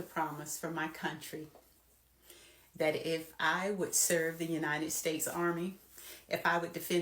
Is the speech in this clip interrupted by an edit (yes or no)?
no